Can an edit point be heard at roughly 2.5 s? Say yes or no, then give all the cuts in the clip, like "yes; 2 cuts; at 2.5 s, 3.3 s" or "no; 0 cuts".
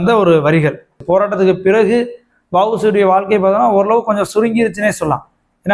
no; 1 cut; at 1.0 s